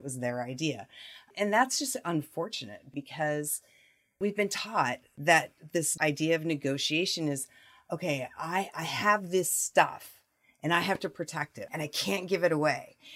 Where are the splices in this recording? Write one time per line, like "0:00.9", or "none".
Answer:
0:01.3
0:02.9
0:04.2
0:05.1
0:05.9
0:11.6